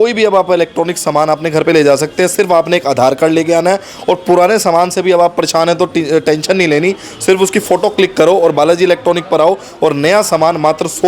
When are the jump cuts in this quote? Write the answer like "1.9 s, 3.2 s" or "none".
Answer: none